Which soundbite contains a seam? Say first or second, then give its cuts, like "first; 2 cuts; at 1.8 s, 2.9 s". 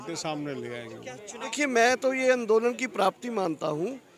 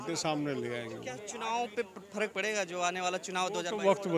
first; 1 cut; at 1.5 s